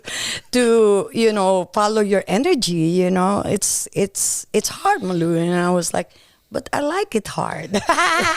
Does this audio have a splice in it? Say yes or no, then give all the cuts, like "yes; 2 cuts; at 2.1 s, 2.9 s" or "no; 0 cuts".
no; 0 cuts